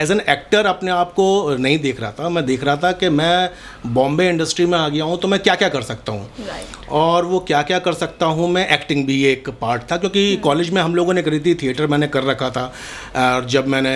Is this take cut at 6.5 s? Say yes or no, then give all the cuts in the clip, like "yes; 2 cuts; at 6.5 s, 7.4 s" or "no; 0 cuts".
no; 0 cuts